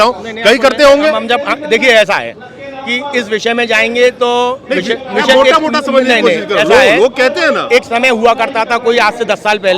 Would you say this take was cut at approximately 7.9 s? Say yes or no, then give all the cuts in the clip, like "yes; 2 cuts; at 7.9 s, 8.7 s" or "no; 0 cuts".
no; 0 cuts